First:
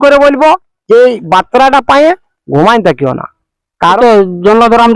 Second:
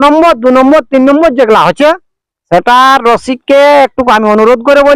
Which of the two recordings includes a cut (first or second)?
first